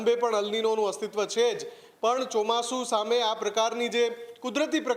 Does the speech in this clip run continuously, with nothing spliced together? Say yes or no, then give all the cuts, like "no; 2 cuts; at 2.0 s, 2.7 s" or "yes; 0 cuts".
yes; 0 cuts